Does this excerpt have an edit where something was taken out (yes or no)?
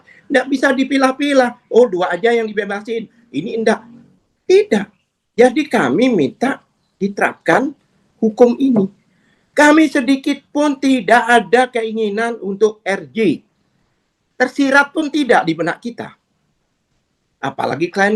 no